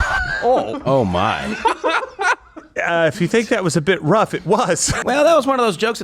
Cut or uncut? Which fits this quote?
cut